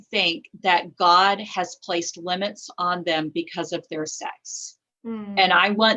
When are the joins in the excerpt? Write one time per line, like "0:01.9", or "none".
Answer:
none